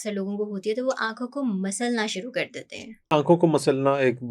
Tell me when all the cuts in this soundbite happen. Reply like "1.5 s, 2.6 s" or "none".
3.1 s